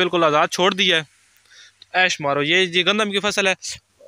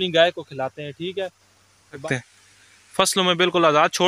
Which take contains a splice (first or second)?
second